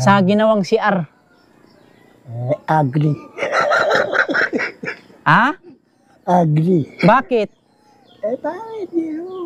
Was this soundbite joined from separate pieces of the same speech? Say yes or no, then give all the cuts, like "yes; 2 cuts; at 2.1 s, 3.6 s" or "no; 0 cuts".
no; 0 cuts